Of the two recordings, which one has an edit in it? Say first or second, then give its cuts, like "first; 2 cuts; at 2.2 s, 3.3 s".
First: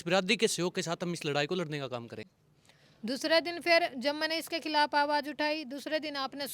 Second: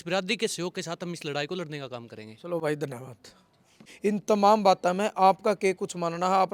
first; 1 cut; at 2.3 s